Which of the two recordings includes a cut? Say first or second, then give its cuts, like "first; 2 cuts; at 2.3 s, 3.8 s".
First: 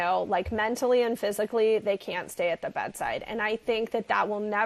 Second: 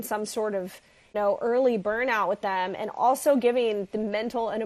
second; 1 cut; at 1.1 s